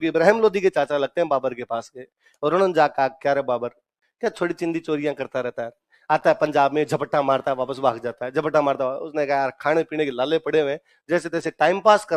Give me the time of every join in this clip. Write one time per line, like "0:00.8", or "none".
none